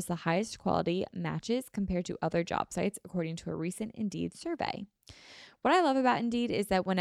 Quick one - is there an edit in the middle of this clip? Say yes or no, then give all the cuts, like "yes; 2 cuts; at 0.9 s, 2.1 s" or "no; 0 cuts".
no; 0 cuts